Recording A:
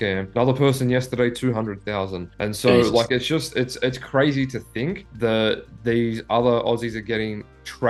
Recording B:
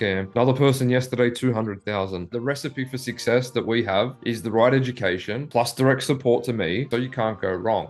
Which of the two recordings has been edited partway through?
B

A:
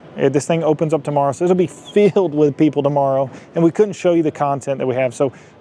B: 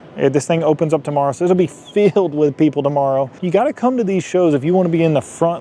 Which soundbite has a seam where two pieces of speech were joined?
B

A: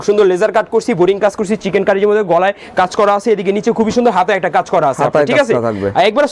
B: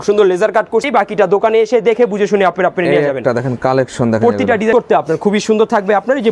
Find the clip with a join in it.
B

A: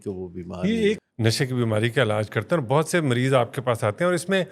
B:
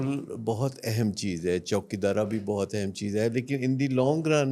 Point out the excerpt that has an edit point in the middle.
A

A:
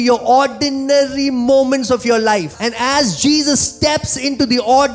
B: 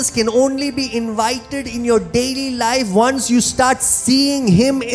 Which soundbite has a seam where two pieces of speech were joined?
A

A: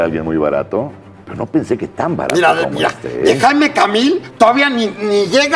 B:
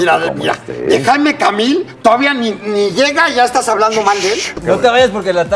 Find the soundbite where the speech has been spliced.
B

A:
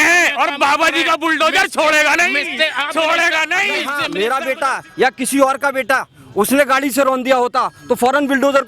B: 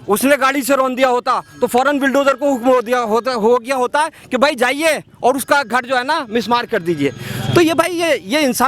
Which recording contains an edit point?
A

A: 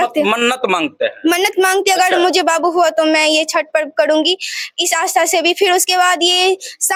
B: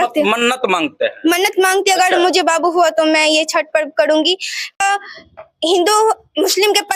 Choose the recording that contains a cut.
B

